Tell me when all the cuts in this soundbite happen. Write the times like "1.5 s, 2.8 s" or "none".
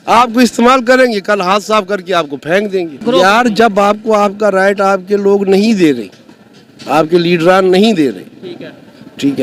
none